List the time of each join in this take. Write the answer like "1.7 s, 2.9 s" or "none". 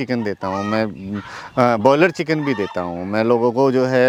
none